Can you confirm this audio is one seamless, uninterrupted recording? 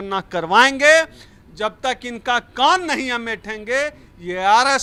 yes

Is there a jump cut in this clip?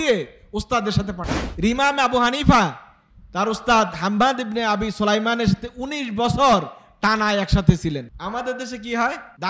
yes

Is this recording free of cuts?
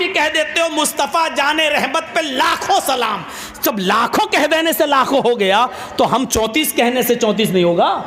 yes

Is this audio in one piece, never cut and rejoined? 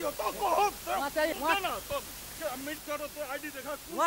no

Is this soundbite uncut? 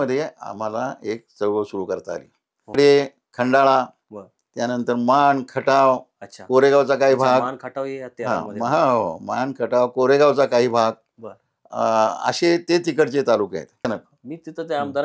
no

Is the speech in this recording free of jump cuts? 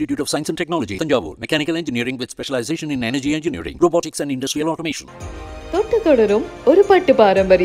yes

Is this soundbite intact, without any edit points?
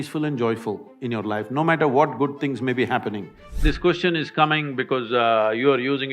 no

